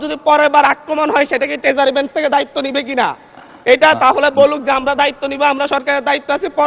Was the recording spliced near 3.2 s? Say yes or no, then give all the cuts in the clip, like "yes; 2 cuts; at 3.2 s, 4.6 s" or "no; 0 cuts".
no; 0 cuts